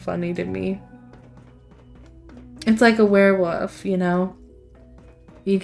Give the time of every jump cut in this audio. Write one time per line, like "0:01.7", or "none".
none